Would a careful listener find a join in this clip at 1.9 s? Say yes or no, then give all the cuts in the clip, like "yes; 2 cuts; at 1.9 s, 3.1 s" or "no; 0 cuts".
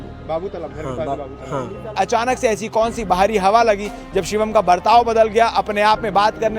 yes; 1 cut; at 1.9 s